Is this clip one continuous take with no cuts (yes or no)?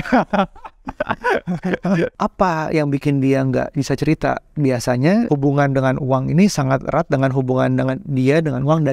no